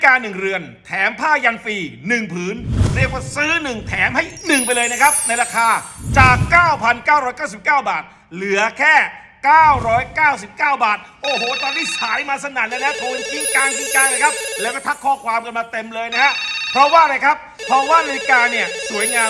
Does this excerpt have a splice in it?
no; 0 cuts

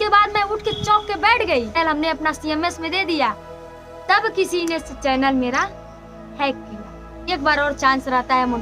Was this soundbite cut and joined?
yes; 2 cuts; at 1.8 s, 7.3 s

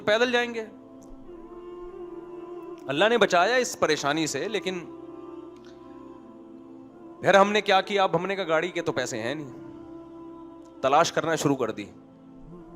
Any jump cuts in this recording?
yes; 5 cuts; at 1.1 s, 2.9 s, 4.9 s, 6.8 s, 11.9 s

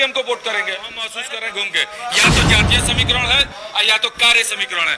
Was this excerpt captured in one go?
no; 1 cut; at 1.1 s

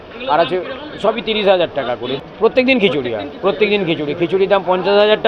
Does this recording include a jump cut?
yes; 1 cut; at 2.2 s

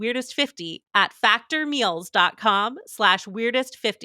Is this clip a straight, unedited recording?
yes; 0 cuts

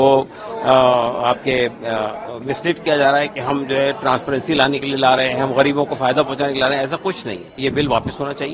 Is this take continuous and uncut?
no; 1 cut; at 7.6 s

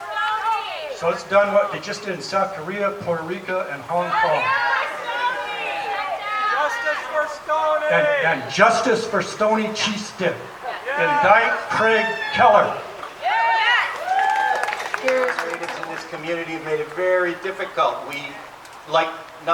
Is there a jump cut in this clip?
yes; 1 cut; at 15.7 s

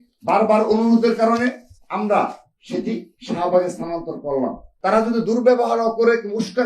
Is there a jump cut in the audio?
yes; 1 cut; at 4.7 s

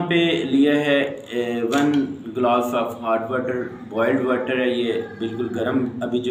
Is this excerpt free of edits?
yes; 0 cuts

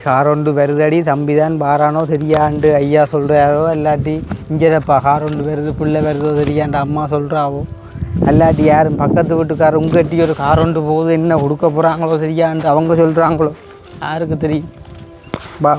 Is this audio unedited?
yes; 0 cuts

